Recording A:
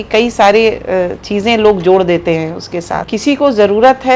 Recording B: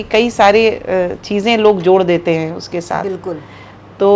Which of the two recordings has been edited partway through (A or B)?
A